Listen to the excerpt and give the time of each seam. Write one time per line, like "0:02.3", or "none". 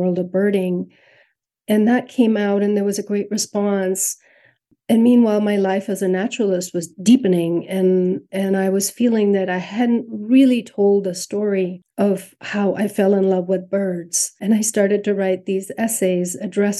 0:14.4